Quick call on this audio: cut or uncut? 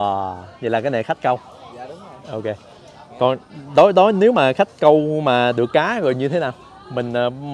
uncut